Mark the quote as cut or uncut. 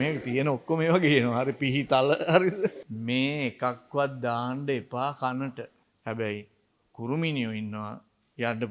cut